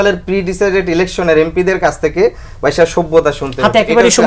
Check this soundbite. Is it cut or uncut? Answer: uncut